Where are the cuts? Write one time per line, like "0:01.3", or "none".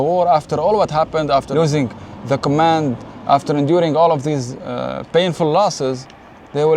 0:01.5